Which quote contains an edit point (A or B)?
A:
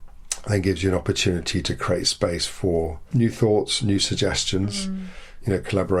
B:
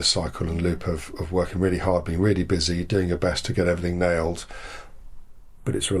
A